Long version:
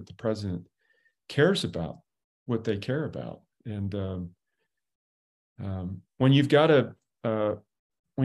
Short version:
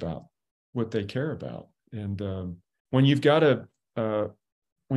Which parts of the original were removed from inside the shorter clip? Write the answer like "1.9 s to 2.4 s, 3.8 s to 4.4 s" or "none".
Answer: 4.5 s to 6.0 s